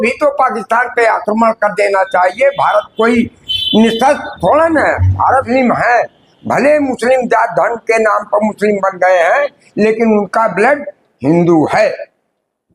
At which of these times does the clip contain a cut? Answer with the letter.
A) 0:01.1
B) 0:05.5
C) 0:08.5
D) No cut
B